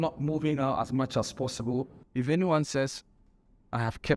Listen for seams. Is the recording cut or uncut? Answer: cut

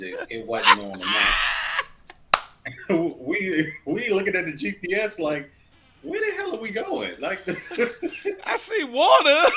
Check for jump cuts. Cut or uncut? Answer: uncut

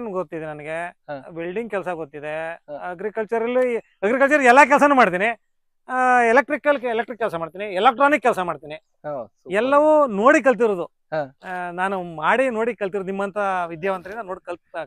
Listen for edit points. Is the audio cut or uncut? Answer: uncut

